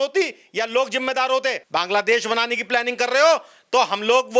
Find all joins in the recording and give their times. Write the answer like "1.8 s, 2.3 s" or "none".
1.6 s